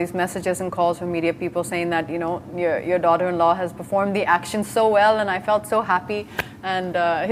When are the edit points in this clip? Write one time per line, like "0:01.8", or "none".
none